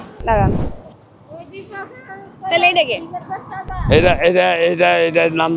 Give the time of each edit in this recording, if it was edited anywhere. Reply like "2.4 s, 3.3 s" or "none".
none